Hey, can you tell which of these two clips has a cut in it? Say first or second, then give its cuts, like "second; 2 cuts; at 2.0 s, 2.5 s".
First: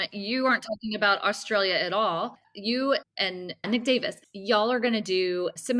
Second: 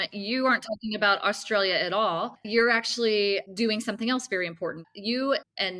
first; 2 cuts; at 2.4 s, 3.6 s